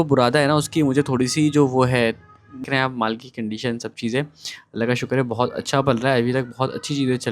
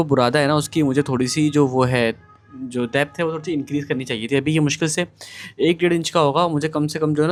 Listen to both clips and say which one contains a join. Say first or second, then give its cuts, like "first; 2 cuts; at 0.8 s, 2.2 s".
first; 1 cut; at 2.7 s